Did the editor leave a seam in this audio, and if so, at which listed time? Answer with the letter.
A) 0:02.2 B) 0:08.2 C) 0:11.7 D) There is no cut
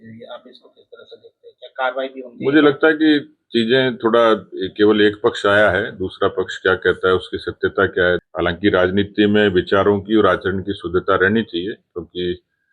B